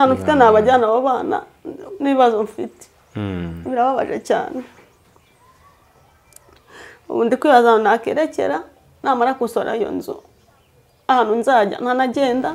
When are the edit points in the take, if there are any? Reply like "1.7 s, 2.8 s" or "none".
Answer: none